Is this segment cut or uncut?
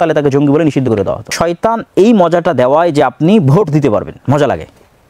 cut